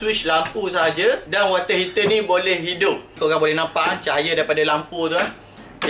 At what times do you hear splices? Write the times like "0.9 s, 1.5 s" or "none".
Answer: 3.0 s